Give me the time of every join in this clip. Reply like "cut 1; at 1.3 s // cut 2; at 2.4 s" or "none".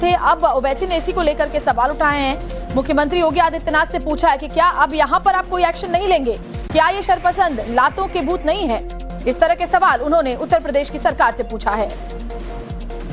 cut 1; at 3.1 s